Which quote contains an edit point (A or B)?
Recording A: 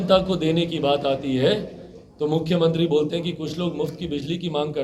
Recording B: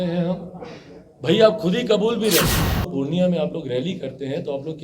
B